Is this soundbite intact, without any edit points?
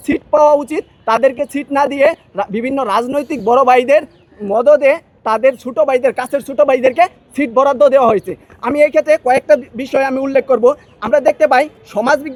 yes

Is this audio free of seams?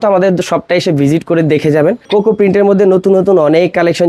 no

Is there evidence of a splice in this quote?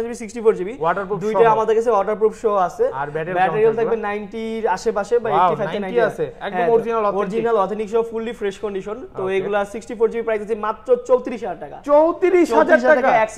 no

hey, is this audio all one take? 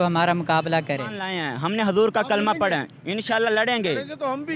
no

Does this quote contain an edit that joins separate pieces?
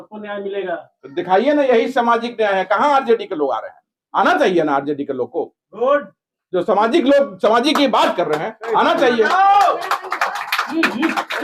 no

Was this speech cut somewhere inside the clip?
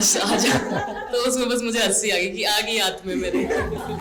no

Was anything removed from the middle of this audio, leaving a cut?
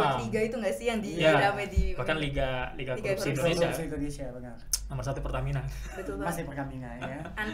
no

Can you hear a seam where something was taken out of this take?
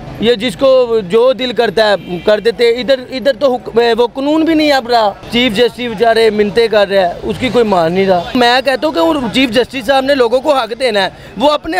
yes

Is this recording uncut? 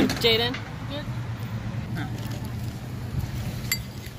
no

